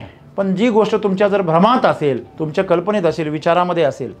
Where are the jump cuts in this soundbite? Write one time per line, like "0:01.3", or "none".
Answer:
0:02.3